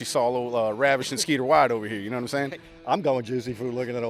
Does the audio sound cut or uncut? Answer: uncut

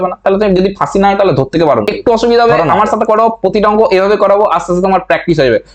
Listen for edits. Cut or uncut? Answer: cut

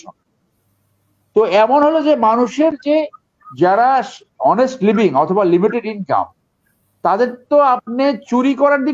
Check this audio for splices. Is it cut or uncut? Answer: uncut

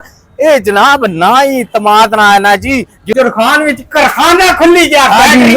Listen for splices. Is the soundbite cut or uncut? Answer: cut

